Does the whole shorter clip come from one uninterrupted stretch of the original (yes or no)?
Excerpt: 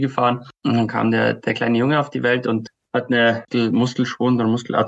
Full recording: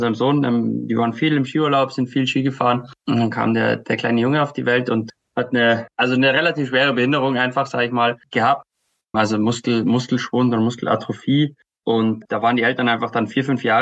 no